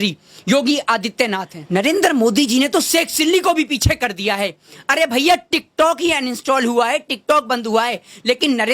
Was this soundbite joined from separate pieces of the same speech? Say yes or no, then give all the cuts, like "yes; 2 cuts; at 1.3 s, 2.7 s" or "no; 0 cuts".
yes; 1 cut; at 1.5 s